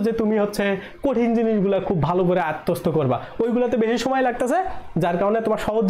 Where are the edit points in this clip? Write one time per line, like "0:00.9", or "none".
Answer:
none

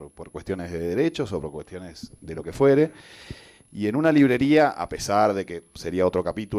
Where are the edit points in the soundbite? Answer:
none

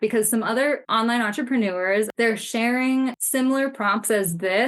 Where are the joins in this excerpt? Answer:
0:00.8
0:02.1
0:03.2

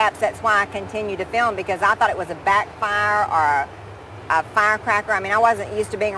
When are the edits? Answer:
0:02.8

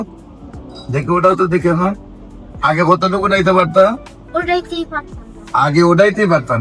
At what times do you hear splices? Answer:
none

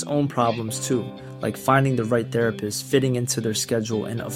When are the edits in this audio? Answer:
none

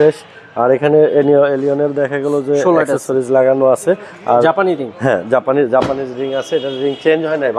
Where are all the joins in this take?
none

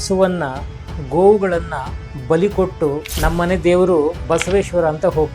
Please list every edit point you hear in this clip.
0:03.1
0:04.2

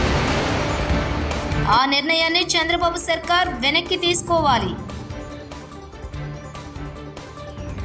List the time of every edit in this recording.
0:01.6

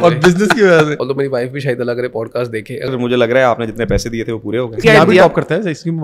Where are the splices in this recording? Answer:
0:00.9
0:02.9
0:04.8

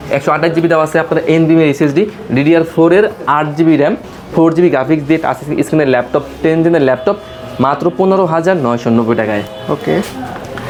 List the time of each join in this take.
none

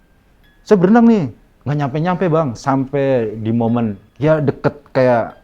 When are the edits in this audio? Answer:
none

